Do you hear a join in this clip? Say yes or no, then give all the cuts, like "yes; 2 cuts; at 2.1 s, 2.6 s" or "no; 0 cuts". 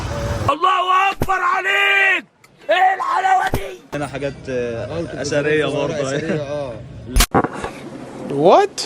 yes; 1 cut; at 3.9 s